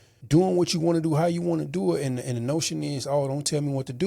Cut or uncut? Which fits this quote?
uncut